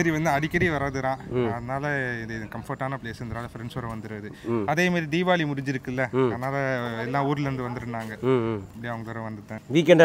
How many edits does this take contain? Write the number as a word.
zero